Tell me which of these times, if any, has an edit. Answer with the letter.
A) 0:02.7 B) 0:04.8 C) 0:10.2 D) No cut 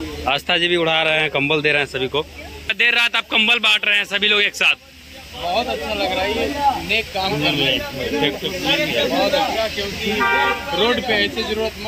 A